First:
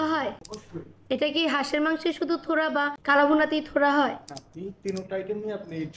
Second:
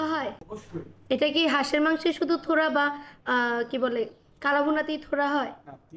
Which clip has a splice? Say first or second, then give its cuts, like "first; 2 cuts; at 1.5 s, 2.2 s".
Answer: first; 1 cut; at 3.0 s